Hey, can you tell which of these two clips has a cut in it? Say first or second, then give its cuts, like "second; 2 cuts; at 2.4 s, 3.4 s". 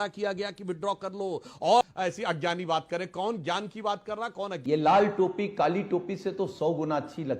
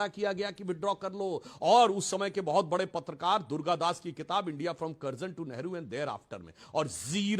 first; 2 cuts; at 1.8 s, 4.5 s